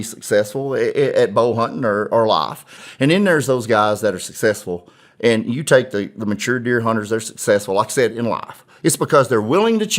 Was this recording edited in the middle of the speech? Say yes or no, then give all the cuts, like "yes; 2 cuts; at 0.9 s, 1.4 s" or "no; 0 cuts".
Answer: yes; 1 cut; at 2.8 s